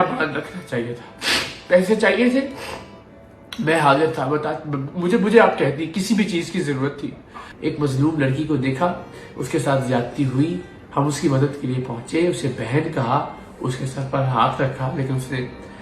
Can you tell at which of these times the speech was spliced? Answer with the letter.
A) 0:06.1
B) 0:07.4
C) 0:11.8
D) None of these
B